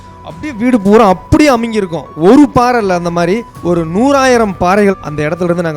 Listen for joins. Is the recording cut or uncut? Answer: cut